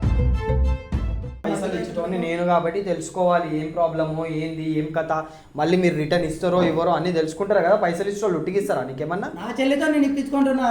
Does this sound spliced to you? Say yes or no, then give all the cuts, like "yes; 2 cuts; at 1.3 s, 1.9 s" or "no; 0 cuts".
yes; 1 cut; at 1.4 s